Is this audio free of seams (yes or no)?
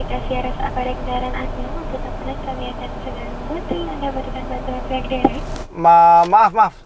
no